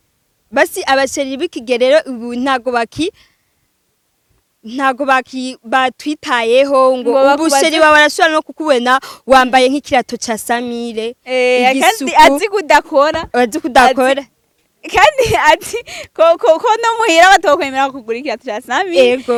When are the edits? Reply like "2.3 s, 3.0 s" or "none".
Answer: none